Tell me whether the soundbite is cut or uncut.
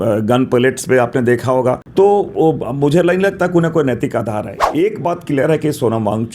cut